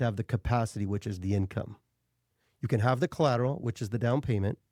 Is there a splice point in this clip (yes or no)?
no